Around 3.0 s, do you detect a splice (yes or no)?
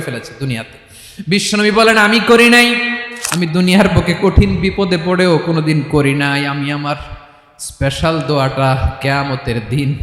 yes